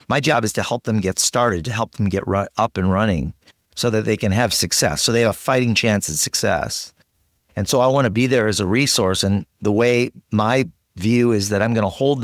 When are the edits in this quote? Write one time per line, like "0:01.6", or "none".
none